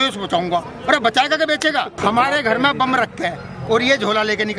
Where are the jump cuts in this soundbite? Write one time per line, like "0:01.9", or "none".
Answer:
0:02.0

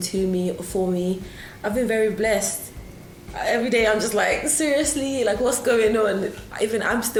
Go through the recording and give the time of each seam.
none

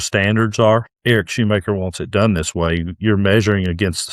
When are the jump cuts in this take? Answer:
0:00.9

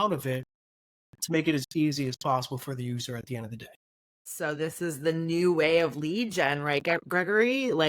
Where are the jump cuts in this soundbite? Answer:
0:04.3

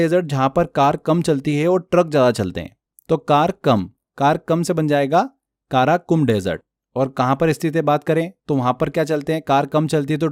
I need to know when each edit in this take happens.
none

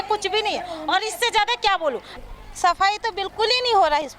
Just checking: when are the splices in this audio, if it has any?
0:02.1

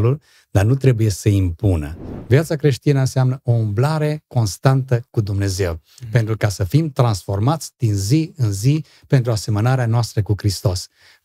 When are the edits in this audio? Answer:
0:02.1

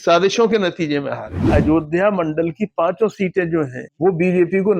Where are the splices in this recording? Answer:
0:01.5
0:03.8

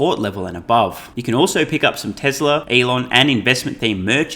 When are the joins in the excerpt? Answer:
0:01.1
0:02.7

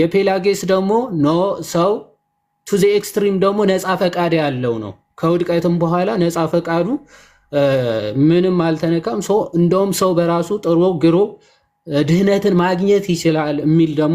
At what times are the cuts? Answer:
none

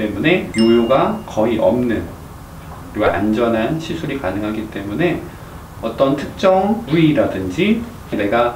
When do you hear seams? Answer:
none

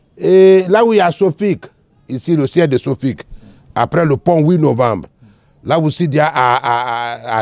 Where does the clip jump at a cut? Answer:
none

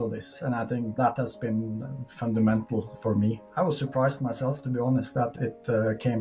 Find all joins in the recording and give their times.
0:01.0
0:03.1
0:05.3

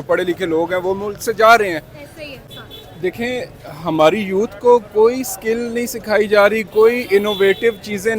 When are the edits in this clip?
0:02.4

